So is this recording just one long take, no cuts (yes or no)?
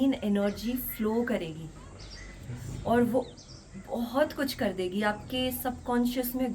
yes